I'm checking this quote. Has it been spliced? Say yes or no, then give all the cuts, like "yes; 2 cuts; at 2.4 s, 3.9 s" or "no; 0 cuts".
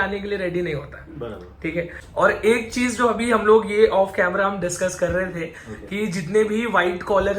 yes; 1 cut; at 2.0 s